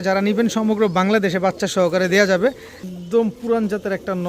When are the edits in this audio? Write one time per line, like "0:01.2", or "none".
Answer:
0:02.8